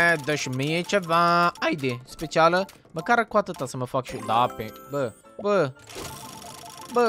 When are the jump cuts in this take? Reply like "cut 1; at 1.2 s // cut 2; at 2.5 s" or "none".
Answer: cut 1; at 5.2 s